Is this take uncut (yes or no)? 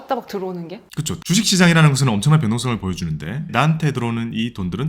no